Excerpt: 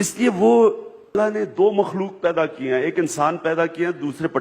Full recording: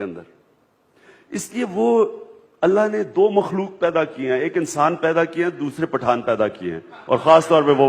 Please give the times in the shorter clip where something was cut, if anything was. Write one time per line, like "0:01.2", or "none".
0:01.2